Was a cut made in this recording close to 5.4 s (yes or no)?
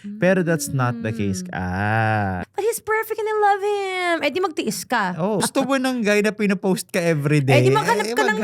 yes